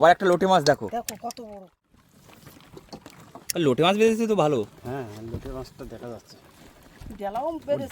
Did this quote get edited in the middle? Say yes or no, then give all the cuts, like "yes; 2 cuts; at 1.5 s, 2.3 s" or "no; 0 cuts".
yes; 1 cut; at 1.6 s